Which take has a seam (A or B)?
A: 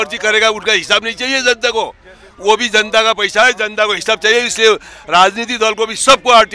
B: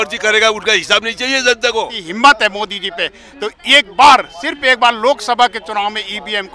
B